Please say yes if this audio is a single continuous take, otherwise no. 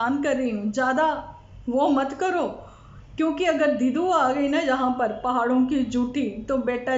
yes